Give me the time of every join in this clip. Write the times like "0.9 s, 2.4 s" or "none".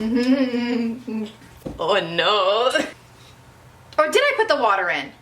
3.0 s